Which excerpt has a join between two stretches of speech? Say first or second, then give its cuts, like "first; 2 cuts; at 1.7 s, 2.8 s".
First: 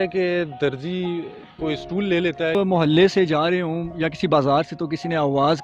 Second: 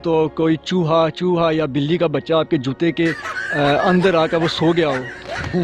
first; 1 cut; at 2.6 s